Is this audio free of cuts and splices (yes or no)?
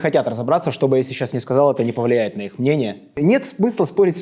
no